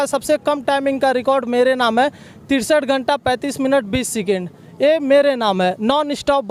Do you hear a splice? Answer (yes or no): no